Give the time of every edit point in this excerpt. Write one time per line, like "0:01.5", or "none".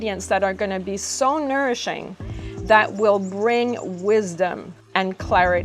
0:04.7

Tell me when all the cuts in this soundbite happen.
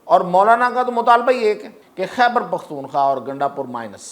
0:01.8

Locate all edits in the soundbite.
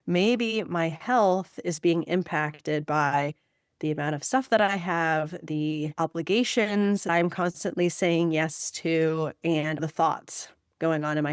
0:05.9
0:07.1
0:09.8

